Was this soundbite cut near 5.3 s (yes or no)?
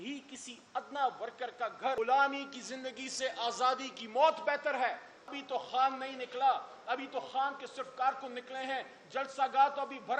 yes